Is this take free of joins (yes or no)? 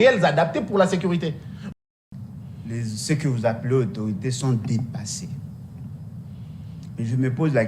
no